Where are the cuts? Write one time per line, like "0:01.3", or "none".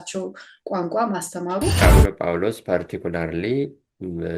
0:01.8